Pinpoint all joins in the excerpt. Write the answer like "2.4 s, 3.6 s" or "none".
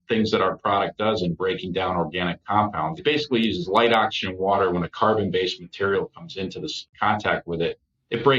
3.0 s, 6.9 s